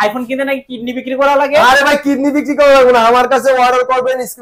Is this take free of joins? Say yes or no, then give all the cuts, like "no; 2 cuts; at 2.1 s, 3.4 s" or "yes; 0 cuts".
yes; 0 cuts